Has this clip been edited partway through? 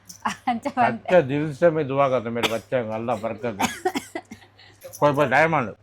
yes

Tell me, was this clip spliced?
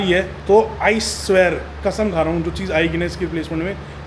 no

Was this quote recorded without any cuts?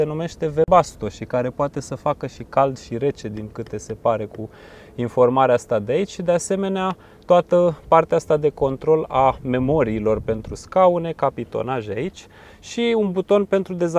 yes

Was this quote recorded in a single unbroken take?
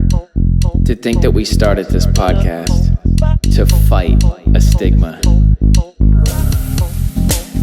no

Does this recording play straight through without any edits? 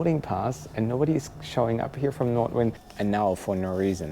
no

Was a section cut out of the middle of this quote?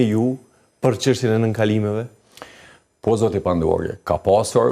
no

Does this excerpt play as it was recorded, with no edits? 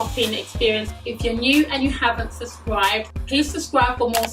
no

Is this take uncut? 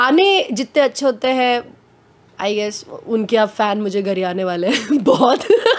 yes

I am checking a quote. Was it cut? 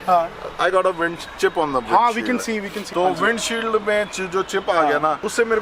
no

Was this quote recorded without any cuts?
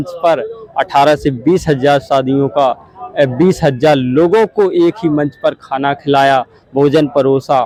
yes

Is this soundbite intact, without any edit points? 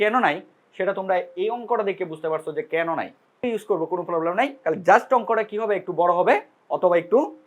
no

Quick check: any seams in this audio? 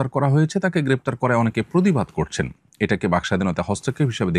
no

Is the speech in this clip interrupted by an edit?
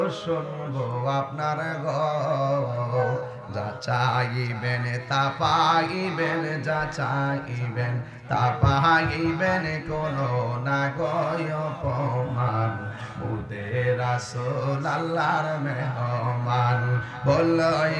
no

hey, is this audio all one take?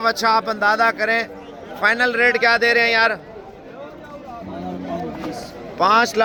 yes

